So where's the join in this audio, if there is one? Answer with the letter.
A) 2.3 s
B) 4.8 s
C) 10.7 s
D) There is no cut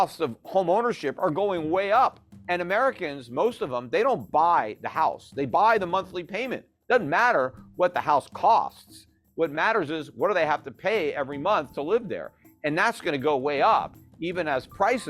A